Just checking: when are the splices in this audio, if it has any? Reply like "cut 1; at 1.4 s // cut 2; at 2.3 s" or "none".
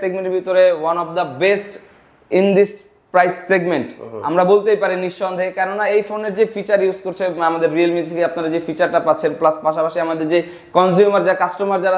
none